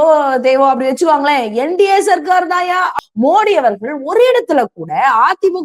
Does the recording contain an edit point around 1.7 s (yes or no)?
no